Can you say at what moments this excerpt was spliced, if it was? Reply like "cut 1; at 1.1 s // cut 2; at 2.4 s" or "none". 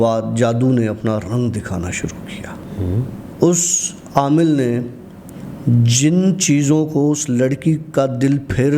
cut 1; at 2.8 s